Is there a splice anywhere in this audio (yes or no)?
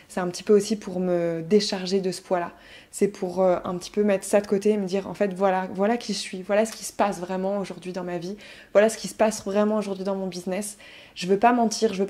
no